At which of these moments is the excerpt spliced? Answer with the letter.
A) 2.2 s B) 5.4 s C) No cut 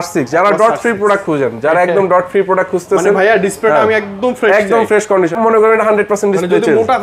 B